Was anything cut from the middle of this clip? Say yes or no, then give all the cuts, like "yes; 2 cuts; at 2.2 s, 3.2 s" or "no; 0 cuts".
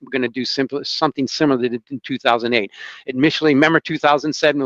no; 0 cuts